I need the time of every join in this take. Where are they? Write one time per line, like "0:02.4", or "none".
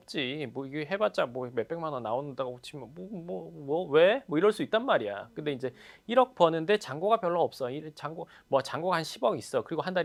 none